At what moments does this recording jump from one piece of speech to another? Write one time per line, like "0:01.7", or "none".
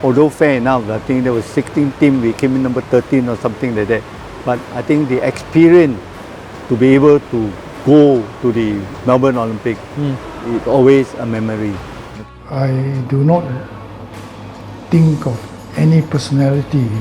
0:12.1